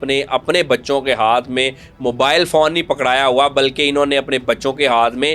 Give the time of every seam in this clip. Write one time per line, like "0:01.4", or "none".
none